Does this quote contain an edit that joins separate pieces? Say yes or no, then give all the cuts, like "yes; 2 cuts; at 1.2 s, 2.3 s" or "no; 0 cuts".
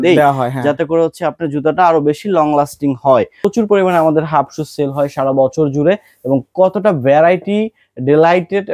yes; 1 cut; at 3.4 s